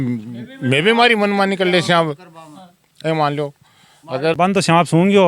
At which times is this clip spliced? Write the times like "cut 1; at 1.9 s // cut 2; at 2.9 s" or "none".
cut 1; at 4.3 s